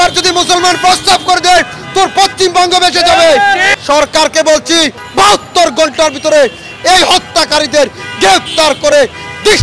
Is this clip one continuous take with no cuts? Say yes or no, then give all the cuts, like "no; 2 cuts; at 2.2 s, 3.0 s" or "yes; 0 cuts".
no; 2 cuts; at 3.7 s, 5.0 s